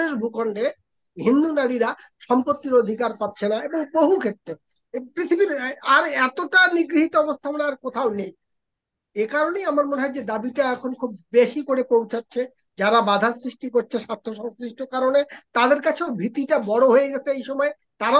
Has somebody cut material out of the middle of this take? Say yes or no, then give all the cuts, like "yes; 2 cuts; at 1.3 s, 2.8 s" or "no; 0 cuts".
no; 0 cuts